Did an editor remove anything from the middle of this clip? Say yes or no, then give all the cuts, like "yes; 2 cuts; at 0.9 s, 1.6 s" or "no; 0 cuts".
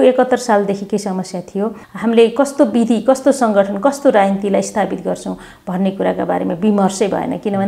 yes; 1 cut; at 1.8 s